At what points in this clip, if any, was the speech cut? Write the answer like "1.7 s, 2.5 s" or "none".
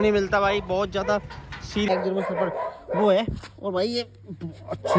1.9 s